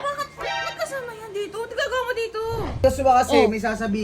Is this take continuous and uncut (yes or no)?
no